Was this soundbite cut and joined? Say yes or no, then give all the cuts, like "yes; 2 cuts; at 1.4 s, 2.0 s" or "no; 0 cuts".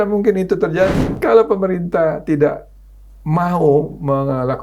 yes; 1 cut; at 1.1 s